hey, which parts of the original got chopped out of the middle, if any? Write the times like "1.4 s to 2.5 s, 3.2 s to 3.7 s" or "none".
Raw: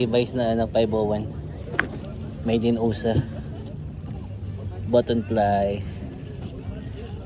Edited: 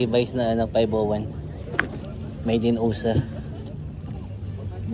none